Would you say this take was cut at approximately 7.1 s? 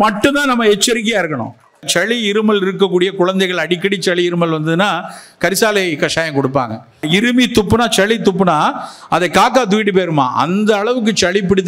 yes; 2 cuts; at 1.9 s, 7.1 s

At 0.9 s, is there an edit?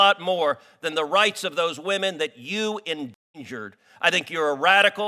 no; 0 cuts

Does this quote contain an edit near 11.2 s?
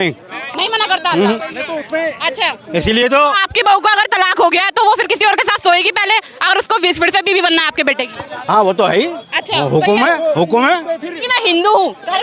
yes; 1 cut; at 11.2 s

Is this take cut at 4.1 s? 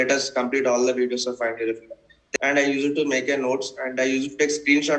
no; 1 cut; at 2.2 s

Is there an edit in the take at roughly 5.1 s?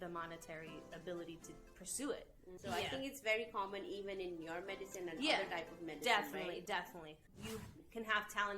no; 2 cuts; at 2.6 s, 7.3 s

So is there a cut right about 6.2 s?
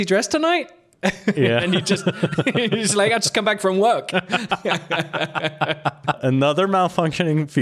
yes; 1 cut; at 6.2 s

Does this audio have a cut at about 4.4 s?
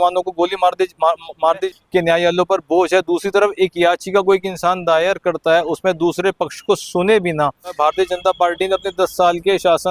no; 2 cuts; at 1.7 s, 7.8 s

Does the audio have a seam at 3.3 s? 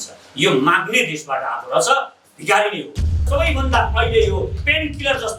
yes; 1 cut; at 3.3 s

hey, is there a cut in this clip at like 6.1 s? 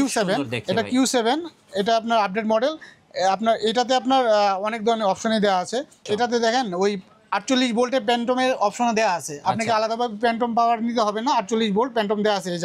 yes; 1 cut; at 6.1 s

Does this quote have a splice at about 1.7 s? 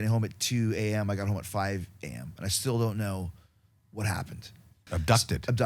no; 1 cut; at 4.8 s

